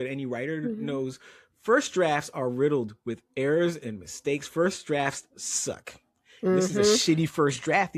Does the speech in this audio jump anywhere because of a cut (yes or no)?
no